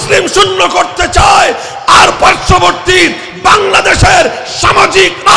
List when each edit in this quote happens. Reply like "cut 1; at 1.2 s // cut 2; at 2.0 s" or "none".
none